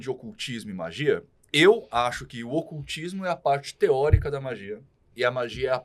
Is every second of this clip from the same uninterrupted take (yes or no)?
yes